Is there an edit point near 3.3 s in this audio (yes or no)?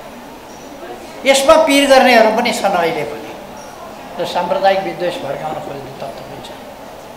no